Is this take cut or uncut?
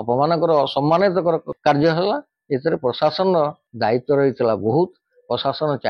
cut